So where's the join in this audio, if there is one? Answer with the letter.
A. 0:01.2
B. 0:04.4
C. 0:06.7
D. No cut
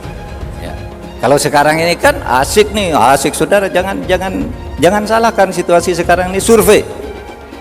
A